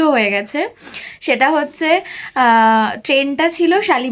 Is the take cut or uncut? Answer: uncut